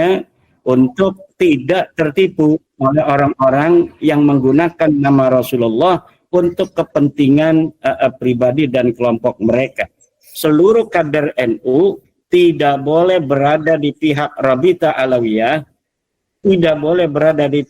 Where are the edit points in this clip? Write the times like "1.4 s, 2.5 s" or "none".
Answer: 10.3 s